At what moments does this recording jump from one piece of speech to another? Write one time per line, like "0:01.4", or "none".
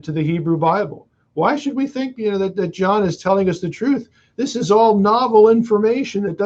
none